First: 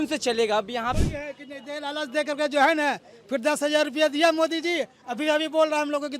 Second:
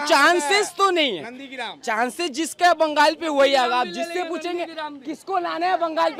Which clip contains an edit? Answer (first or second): first